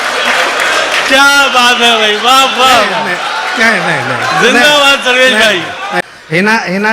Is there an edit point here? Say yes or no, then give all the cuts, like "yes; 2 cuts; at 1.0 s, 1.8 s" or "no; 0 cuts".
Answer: yes; 1 cut; at 6.0 s